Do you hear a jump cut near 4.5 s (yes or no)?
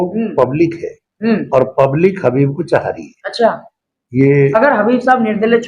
yes